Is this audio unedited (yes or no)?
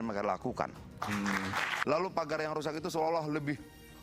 no